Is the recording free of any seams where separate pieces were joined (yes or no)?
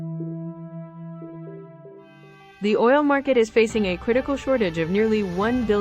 no